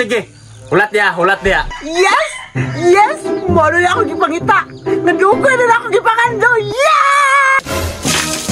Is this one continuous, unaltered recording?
no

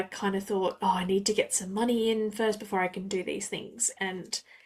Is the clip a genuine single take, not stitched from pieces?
yes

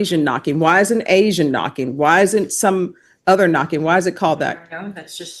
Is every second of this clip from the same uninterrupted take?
yes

